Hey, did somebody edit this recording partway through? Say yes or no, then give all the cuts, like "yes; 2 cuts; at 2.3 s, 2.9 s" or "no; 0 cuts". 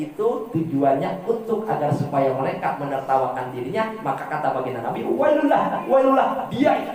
no; 0 cuts